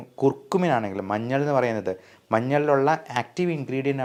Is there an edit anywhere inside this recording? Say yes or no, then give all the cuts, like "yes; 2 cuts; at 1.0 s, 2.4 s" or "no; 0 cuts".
no; 0 cuts